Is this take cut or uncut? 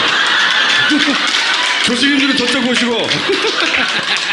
cut